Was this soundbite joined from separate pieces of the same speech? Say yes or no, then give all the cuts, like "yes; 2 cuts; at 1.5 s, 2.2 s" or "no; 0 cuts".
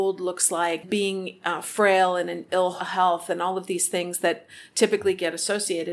yes; 2 cuts; at 0.8 s, 2.8 s